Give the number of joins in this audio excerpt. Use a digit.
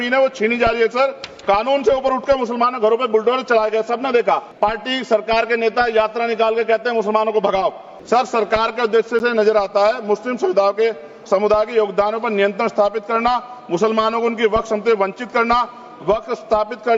2